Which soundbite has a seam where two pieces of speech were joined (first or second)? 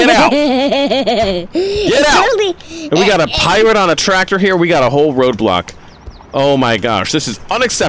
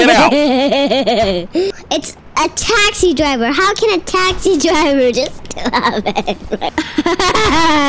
second